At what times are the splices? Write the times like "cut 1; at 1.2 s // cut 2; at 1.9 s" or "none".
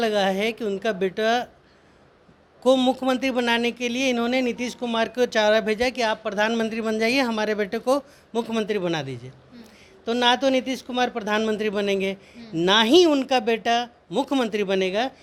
none